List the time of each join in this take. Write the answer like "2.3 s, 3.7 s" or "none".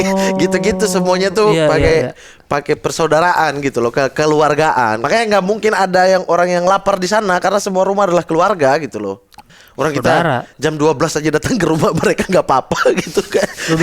5.0 s, 9.4 s